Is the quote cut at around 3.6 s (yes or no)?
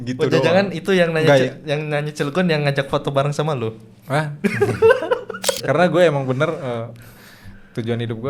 no